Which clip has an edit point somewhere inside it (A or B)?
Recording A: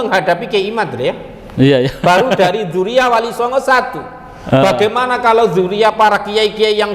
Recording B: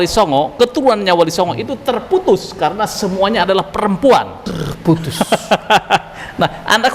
B